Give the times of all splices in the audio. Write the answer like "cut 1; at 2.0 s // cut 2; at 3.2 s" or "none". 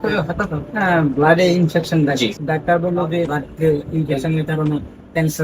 cut 1; at 2.4 s // cut 2; at 3.4 s